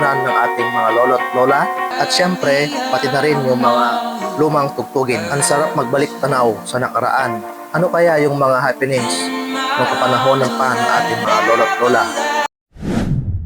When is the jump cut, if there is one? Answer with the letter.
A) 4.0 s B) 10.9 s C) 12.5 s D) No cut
C